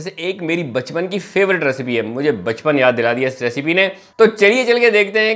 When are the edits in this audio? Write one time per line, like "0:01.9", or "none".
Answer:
none